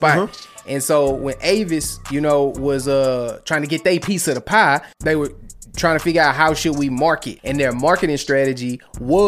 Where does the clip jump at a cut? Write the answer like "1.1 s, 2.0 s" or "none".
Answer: 4.9 s, 7.3 s